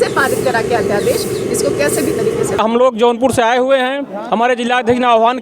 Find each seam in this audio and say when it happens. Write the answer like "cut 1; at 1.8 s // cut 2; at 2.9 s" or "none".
cut 1; at 2.6 s